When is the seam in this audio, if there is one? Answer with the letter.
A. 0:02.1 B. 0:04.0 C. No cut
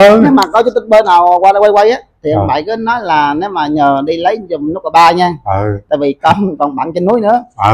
C